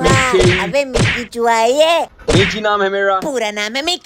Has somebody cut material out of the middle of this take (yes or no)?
yes